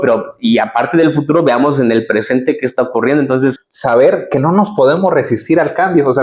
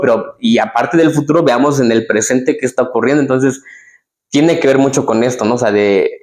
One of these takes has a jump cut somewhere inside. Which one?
first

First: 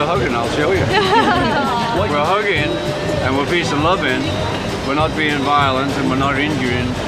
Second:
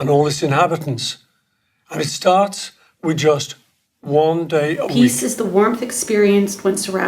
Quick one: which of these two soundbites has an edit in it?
second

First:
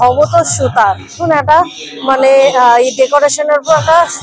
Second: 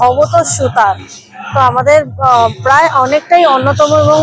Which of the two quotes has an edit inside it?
first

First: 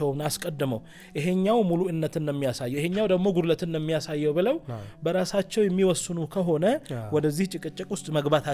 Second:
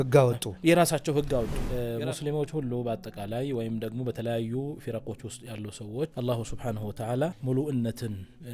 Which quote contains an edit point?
second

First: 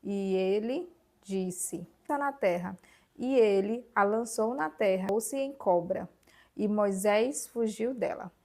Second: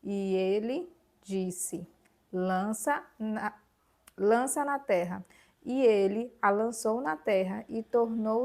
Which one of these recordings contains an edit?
first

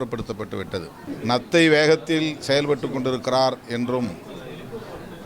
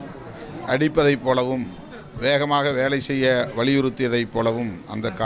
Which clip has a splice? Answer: first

